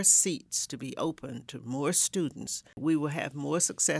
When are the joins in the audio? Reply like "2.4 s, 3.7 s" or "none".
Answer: 2.8 s